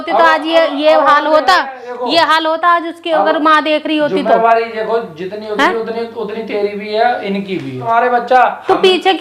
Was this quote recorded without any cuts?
no; 1 cut; at 7.8 s

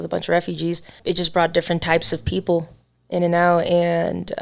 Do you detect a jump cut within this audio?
yes; 1 cut; at 0.9 s

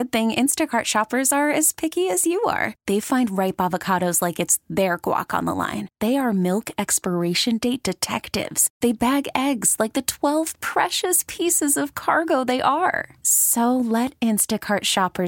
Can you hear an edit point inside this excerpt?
no; 0 cuts

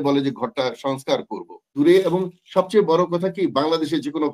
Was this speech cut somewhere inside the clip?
yes; 1 cut; at 1.7 s

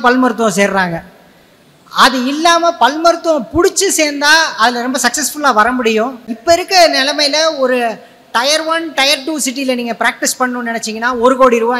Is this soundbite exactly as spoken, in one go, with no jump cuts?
no; 1 cut; at 6.3 s

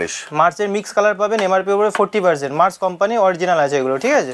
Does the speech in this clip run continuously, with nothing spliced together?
yes; 0 cuts

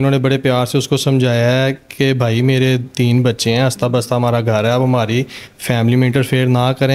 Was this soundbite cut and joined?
no; 0 cuts

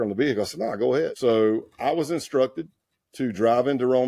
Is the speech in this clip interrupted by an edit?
yes; 1 cut; at 1.1 s

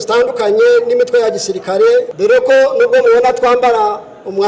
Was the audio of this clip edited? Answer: yes; 1 cut; at 2.1 s

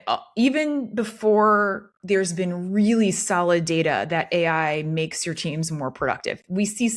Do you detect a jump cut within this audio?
no; 0 cuts

